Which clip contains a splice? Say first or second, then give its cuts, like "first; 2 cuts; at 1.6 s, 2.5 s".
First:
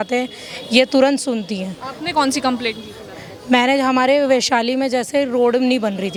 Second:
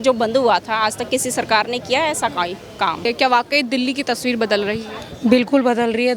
second; 1 cut; at 3.1 s